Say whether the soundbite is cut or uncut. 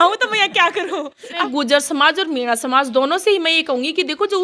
cut